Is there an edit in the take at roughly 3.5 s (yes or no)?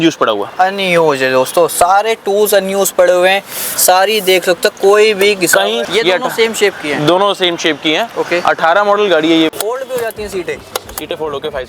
no